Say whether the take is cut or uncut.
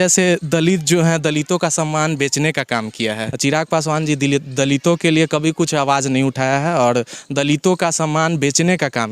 cut